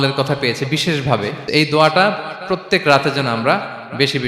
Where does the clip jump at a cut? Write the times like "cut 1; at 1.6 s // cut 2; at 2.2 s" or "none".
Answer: cut 1; at 1.4 s